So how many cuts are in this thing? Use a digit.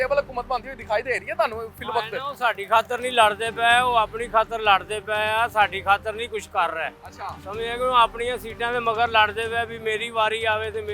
0